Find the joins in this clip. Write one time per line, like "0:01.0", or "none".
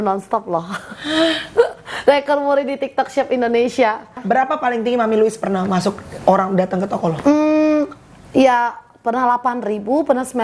0:04.2